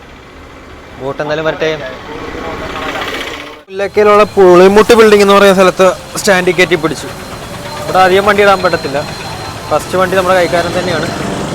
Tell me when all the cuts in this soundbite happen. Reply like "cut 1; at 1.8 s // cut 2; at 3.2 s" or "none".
cut 1; at 3.6 s

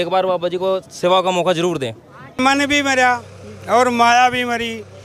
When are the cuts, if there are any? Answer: cut 1; at 2.4 s

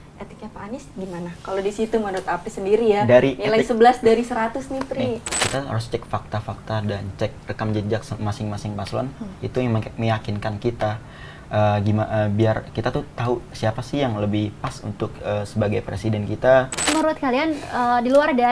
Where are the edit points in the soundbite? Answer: cut 1; at 5.3 s // cut 2; at 16.9 s

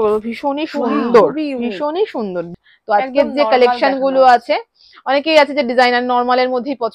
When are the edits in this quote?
cut 1; at 2.5 s

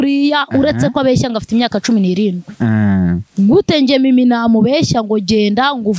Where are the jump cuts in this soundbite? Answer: none

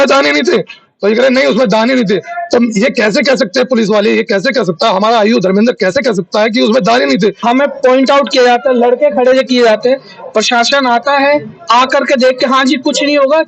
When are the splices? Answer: cut 1; at 7.4 s

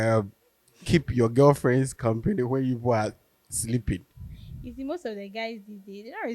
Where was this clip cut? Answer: cut 1; at 4.2 s

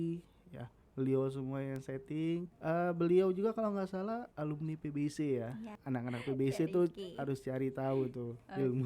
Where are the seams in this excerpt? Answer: cut 1; at 2.5 s // cut 2; at 4.3 s // cut 3; at 5.7 s

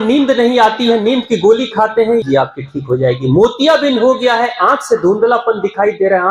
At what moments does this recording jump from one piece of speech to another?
cut 1; at 2.2 s

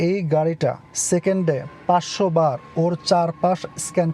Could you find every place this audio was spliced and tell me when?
cut 1; at 0.9 s

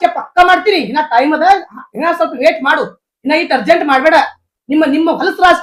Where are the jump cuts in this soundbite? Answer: none

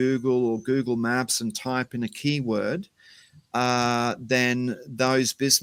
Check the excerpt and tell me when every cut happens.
none

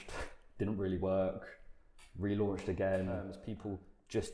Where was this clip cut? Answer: cut 1; at 3.5 s

